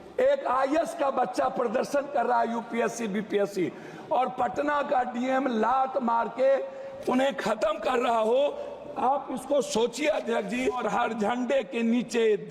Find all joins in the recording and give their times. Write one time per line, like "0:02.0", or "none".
0:10.8